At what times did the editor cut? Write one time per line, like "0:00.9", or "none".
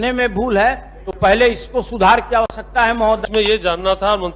0:03.2